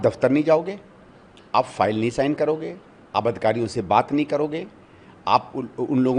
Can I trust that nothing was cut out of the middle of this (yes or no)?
yes